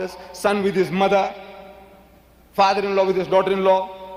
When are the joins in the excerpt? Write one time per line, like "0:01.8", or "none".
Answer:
none